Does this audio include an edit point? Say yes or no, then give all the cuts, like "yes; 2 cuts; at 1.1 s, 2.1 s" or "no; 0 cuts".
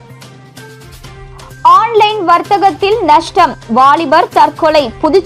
no; 0 cuts